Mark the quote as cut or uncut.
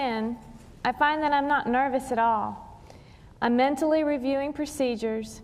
cut